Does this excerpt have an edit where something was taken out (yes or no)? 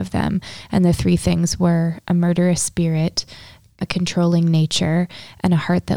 yes